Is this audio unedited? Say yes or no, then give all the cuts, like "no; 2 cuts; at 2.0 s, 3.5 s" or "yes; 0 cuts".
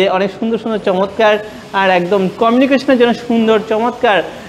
yes; 0 cuts